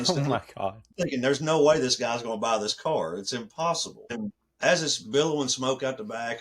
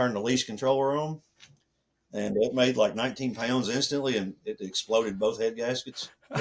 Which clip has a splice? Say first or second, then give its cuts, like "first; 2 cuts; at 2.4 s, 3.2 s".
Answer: first; 2 cuts; at 0.9 s, 4.1 s